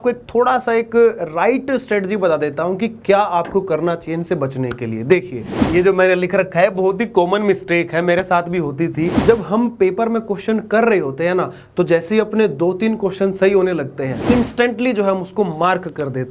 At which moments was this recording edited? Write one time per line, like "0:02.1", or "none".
0:05.7
0:09.2
0:14.2